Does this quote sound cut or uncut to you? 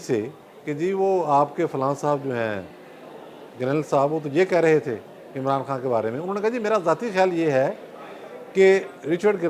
uncut